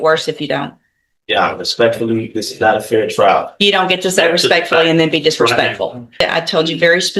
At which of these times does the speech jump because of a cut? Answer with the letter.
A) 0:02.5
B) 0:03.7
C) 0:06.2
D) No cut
C